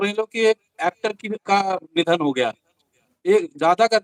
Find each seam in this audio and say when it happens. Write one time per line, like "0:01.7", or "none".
none